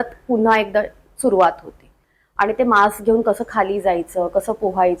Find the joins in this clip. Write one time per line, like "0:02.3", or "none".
none